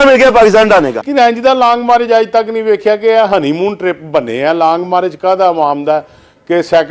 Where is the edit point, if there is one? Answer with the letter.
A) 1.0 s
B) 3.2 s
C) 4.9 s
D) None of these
A